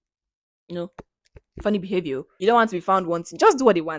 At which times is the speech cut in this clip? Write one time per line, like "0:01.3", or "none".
0:02.3